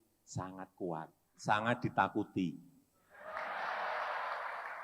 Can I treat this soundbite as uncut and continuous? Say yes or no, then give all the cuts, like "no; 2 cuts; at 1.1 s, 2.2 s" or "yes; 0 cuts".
no; 1 cut; at 1.2 s